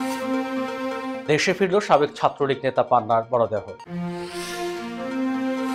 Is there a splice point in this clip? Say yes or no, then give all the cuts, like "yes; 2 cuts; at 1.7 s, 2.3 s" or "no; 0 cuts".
no; 0 cuts